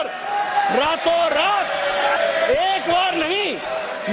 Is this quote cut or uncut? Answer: cut